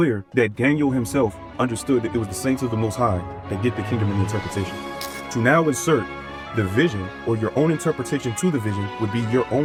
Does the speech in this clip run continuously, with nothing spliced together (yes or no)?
yes